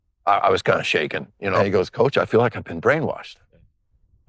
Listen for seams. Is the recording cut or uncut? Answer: cut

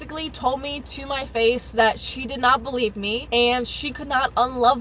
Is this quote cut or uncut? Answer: uncut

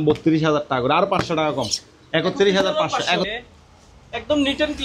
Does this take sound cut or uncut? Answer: cut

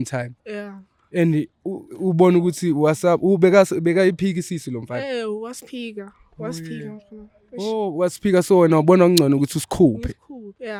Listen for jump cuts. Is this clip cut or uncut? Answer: uncut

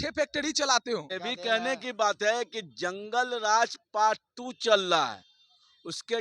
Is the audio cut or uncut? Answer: cut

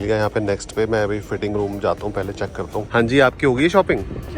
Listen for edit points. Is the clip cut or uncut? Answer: cut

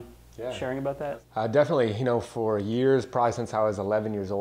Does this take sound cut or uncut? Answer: cut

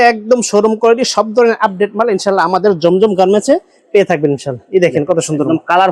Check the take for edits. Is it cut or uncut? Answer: uncut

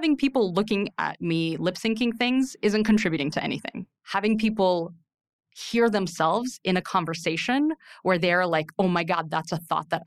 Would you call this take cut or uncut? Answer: uncut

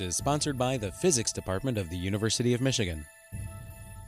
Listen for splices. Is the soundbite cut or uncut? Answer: cut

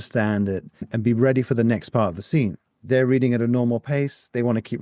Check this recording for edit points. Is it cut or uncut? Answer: cut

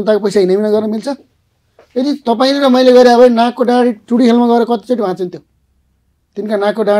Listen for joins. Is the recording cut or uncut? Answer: uncut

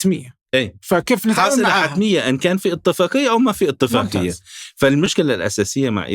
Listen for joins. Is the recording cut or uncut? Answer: cut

